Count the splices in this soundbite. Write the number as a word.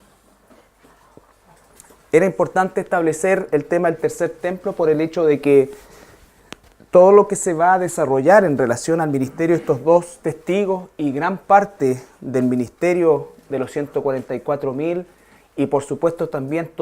one